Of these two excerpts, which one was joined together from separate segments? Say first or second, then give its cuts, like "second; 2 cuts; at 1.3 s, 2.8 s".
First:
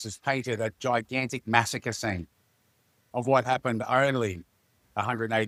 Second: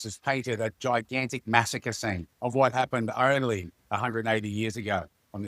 second; 2 cuts; at 2.3 s, 3.7 s